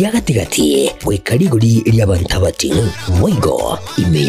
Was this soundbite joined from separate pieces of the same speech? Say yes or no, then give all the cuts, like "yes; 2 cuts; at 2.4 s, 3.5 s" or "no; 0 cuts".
no; 0 cuts